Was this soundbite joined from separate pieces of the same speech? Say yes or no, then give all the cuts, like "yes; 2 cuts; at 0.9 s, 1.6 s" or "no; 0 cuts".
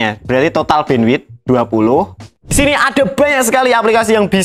yes; 1 cut; at 2.5 s